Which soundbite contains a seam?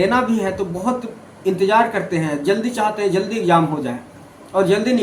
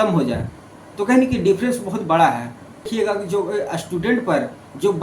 second; 1 cut; at 2.9 s

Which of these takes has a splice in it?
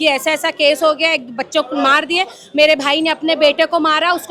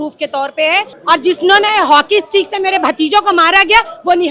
second; 1 cut; at 0.9 s

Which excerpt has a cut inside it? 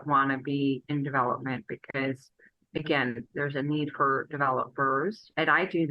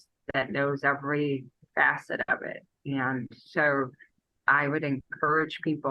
first; 1 cut; at 3.2 s

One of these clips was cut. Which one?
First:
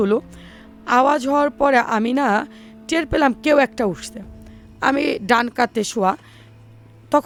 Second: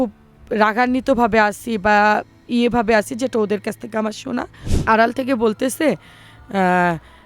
second; 1 cut; at 4.6 s

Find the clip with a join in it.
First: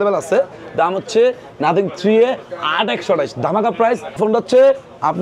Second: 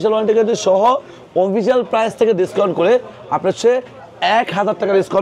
first; 1 cut; at 4.2 s

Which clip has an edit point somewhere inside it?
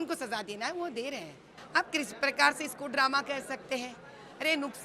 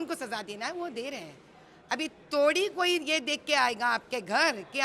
first; 1 cut; at 1.5 s

